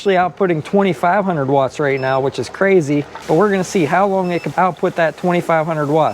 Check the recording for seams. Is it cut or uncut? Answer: cut